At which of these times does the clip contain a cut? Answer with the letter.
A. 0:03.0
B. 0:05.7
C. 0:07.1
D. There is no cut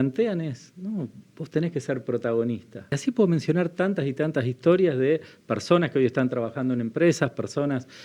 A